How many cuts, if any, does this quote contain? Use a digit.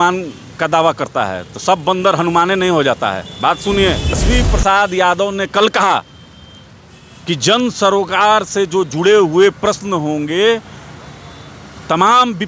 1